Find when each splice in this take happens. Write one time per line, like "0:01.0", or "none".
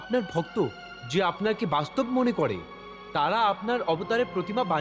none